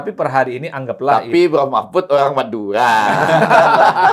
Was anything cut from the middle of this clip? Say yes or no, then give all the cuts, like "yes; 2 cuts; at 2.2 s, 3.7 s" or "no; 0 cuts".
no; 0 cuts